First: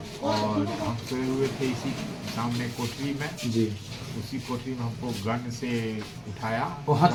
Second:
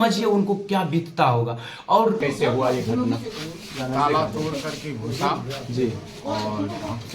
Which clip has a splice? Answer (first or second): second